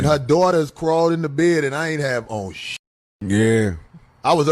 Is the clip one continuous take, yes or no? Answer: yes